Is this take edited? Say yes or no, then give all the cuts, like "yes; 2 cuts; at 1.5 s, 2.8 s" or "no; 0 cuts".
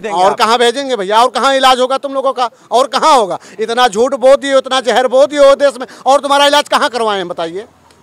no; 0 cuts